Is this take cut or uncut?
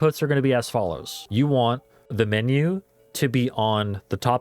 cut